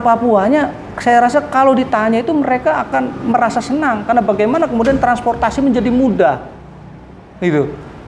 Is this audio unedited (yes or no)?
yes